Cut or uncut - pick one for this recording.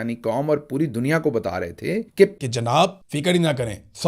cut